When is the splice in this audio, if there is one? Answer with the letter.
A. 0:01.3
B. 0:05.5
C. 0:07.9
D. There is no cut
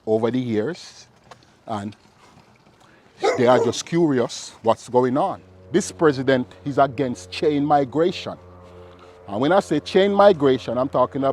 B